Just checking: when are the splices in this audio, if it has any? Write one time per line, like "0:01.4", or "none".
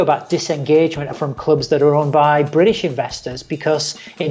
0:01.1